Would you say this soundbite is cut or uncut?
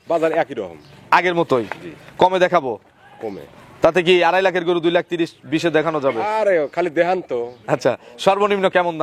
uncut